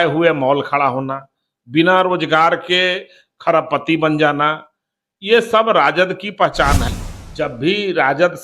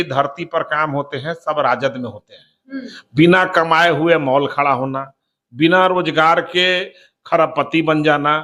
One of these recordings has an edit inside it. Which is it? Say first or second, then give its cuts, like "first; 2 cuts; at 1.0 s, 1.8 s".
first; 1 cut; at 6.9 s